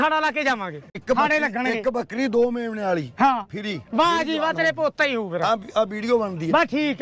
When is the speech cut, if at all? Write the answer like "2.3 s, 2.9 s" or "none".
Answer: 1.0 s